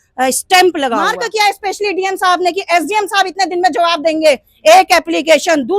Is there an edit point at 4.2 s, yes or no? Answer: no